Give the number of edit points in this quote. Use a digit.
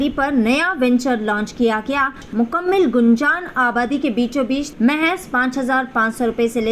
2